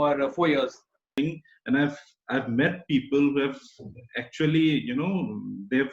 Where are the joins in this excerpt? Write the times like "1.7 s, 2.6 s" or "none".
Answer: 1.1 s